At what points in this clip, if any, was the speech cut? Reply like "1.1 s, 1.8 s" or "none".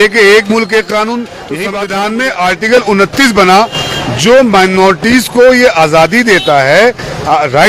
1.6 s